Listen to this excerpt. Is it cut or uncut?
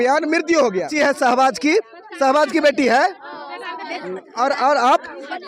cut